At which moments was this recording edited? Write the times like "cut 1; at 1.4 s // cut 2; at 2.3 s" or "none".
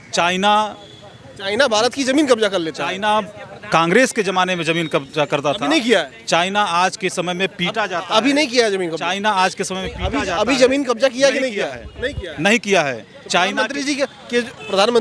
none